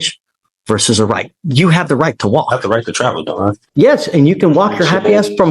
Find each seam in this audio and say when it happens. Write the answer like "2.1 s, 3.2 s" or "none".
3.6 s